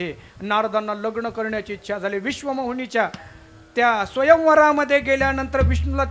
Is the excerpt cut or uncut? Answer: uncut